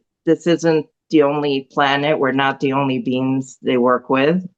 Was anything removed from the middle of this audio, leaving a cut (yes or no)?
no